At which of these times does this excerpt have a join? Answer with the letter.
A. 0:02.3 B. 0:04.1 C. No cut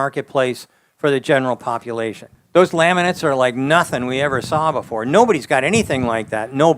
A